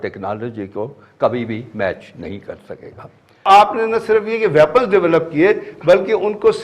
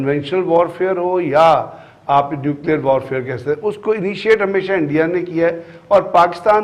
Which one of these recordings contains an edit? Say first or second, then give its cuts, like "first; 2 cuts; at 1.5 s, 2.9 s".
first; 1 cut; at 3.4 s